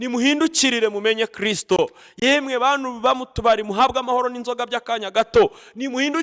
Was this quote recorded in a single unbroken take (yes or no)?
yes